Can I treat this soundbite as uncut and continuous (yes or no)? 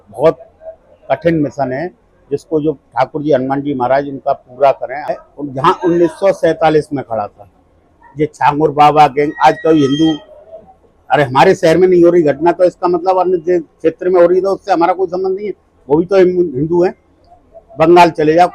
no